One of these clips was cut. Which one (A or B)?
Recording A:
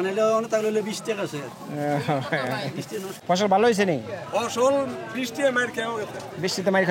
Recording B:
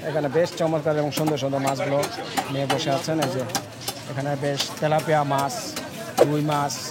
A